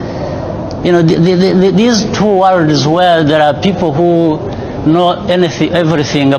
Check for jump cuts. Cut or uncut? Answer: uncut